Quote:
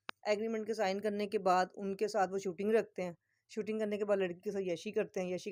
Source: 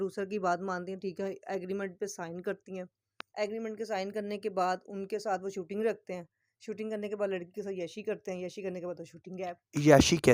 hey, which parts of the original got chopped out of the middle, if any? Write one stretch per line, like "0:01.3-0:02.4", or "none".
none